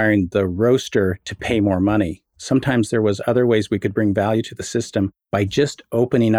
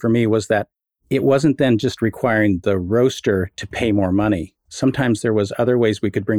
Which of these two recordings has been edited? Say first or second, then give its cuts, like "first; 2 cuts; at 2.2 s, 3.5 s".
first; 1 cut; at 5.2 s